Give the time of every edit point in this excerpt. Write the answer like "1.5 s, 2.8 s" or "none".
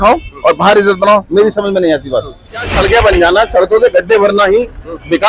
2.7 s